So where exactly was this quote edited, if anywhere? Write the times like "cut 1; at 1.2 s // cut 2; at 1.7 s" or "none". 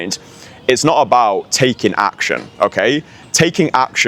none